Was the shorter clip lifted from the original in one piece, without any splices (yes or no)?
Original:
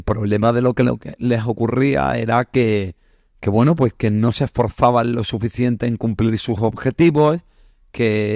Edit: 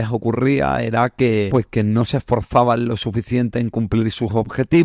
no